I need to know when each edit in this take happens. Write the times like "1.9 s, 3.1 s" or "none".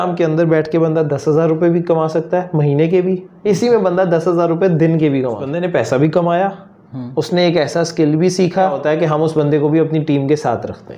5.5 s, 8.8 s

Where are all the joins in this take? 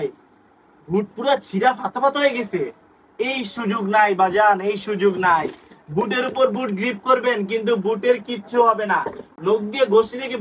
none

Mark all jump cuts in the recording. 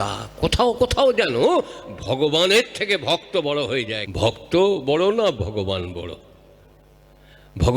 4.0 s

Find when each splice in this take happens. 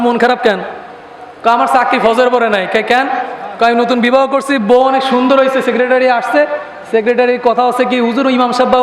none

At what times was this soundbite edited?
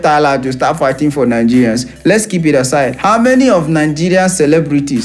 none

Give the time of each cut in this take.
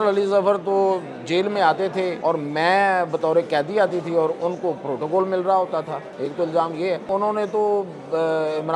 2.2 s, 6.0 s, 7.1 s

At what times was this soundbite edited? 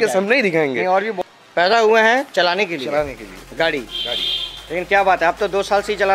1.2 s

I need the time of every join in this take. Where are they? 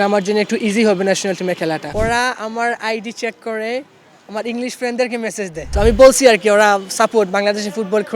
1.9 s, 5.6 s

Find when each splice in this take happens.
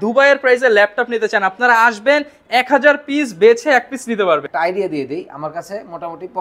4.5 s

